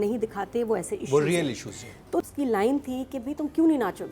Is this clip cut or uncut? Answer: cut